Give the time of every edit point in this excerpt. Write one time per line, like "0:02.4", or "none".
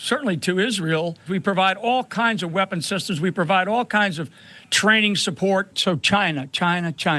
0:01.2
0:05.8